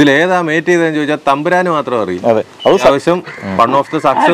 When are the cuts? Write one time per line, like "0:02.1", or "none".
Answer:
0:02.9